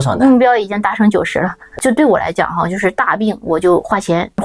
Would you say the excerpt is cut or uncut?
uncut